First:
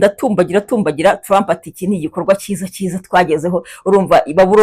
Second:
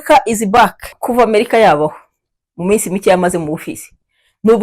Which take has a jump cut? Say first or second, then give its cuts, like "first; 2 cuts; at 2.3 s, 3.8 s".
second; 1 cut; at 1.0 s